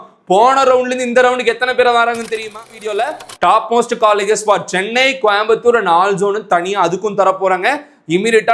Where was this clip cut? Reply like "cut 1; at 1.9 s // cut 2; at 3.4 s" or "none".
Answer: cut 1; at 2.8 s